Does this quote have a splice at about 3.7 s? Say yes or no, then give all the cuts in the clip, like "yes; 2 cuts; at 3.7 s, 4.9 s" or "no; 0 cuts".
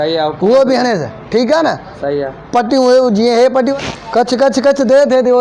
yes; 1 cut; at 3.7 s